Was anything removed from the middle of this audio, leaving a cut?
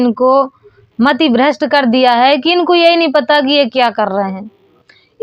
no; 0 cuts

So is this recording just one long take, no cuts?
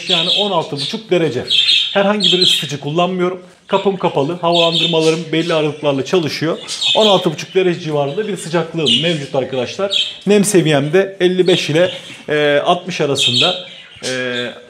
yes; 0 cuts

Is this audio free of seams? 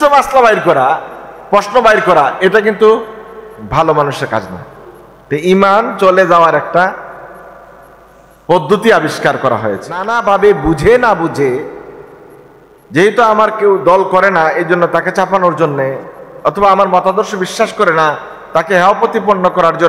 no; 1 cut; at 10.1 s

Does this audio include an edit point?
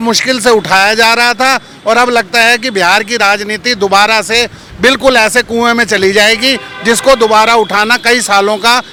no; 0 cuts

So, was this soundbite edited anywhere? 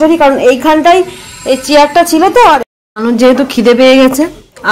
yes; 1 cut; at 2.6 s

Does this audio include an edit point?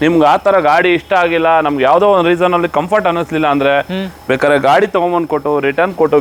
no; 0 cuts

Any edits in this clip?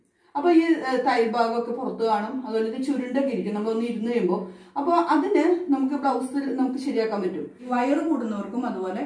yes; 1 cut; at 7.5 s

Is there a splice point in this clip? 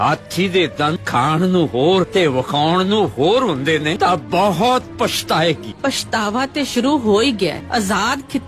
yes; 5 cuts; at 1.0 s, 2.1 s, 3.9 s, 5.7 s, 7.6 s

